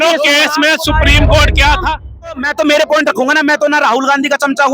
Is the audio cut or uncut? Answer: cut